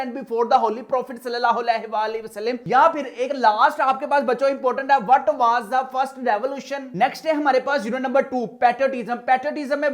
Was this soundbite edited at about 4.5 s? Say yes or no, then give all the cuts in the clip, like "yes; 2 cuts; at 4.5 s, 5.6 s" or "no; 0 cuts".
no; 1 cut; at 6.8 s